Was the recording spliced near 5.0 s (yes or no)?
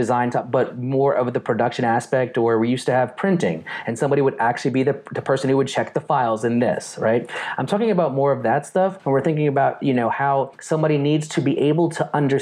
no